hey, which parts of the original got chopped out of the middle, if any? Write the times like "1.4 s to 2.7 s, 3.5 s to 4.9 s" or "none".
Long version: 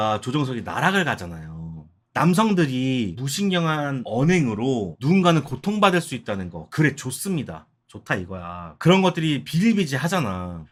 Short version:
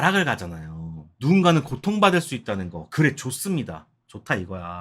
1.9 s to 4.9 s